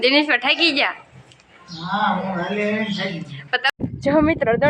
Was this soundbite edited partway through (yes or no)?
yes